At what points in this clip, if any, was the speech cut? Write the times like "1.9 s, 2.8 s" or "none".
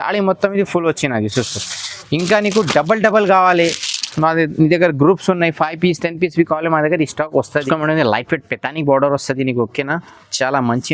7.6 s